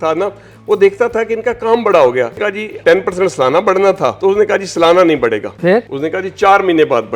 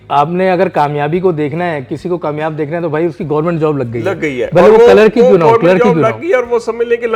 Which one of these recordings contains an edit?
first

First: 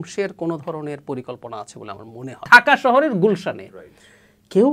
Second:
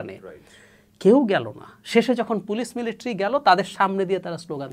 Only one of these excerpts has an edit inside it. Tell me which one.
first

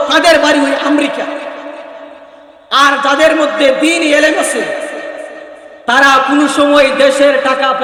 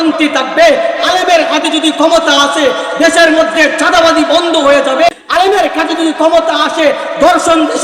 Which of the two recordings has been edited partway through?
second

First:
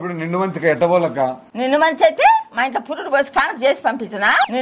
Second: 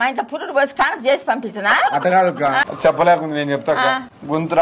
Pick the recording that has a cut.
second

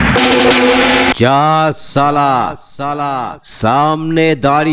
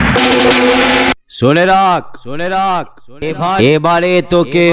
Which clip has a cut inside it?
first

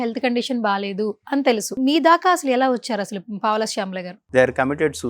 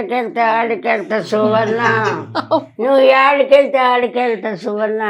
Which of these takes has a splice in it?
first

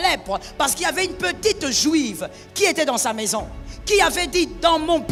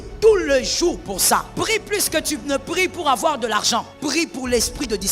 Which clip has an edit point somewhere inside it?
second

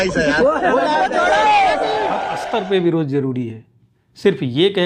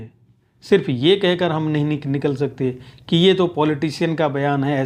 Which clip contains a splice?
first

